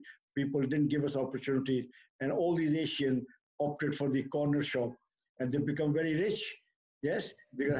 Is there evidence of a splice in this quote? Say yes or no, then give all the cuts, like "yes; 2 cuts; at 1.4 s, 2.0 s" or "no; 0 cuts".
no; 0 cuts